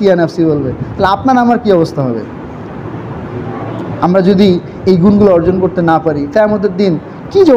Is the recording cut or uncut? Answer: uncut